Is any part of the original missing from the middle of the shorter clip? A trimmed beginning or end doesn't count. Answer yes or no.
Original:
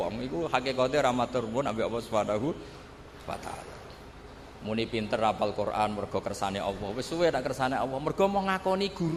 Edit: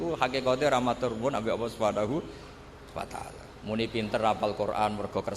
yes